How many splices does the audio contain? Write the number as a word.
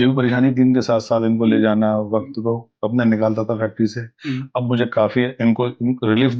zero